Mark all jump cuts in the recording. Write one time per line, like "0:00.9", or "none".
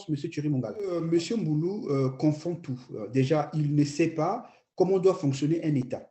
0:01.0